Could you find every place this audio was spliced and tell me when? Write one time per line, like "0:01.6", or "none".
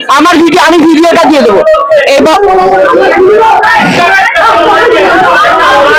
none